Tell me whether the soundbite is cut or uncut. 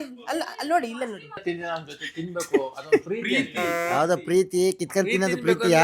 cut